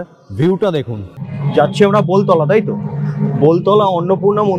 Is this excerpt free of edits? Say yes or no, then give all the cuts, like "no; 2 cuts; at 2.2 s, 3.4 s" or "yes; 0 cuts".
no; 1 cut; at 1.3 s